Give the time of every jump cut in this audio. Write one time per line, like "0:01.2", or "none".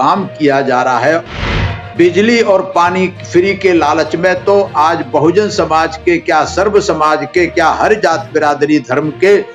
0:01.6